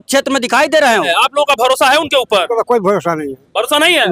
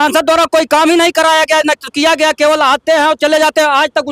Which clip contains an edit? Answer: first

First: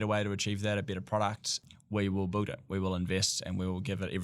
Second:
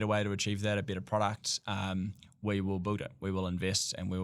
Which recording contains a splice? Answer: first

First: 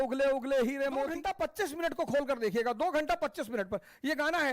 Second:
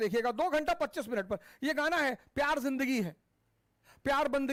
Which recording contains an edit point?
first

